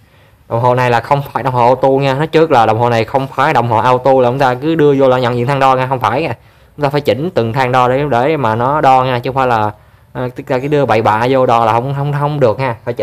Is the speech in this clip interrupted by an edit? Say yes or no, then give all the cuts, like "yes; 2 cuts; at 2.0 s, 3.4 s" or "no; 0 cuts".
no; 0 cuts